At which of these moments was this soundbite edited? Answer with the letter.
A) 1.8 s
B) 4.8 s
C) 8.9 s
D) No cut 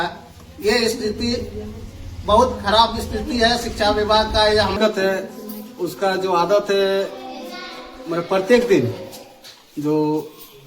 B